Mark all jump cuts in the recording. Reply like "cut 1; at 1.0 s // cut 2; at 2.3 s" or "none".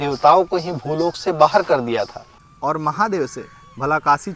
cut 1; at 2.1 s